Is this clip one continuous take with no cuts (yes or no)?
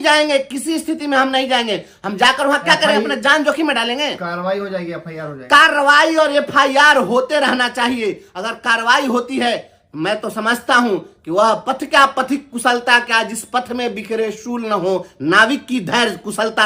yes